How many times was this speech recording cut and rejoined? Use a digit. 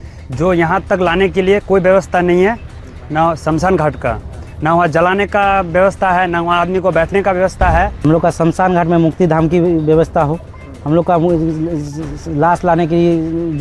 1